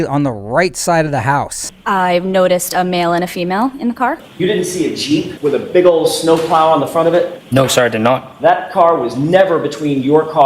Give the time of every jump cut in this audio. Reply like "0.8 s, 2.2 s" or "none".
1.6 s, 4.3 s, 5.3 s